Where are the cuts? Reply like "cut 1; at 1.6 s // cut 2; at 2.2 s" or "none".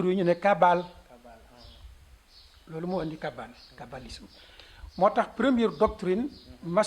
none